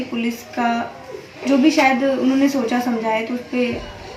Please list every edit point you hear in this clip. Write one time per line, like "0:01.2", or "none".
none